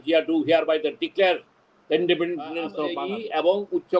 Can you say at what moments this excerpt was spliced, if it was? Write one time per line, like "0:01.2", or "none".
0:02.9